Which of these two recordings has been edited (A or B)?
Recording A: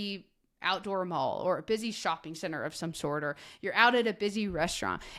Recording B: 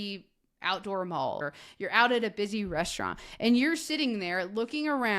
B